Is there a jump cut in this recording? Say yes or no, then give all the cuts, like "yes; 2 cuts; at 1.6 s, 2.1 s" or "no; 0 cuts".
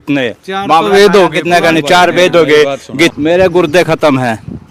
yes; 1 cut; at 3.1 s